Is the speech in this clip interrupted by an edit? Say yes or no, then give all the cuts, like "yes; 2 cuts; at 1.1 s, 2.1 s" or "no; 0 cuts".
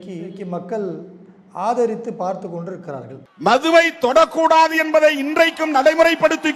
no; 0 cuts